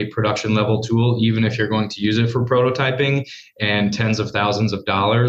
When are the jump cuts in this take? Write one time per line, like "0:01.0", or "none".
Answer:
none